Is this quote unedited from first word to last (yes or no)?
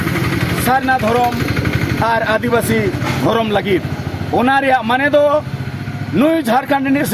yes